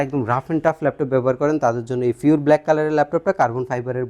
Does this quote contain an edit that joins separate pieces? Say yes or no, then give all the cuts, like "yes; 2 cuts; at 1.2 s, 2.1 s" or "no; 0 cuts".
no; 0 cuts